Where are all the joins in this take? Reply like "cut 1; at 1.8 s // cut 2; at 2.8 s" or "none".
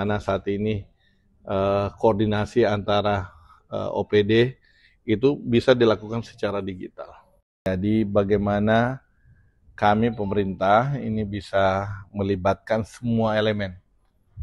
cut 1; at 7.7 s